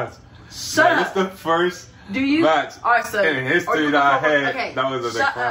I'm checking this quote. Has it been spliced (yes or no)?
no